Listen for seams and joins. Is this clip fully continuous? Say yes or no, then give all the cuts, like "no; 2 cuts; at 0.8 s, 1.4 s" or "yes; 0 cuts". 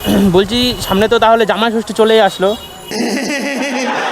no; 1 cut; at 2.8 s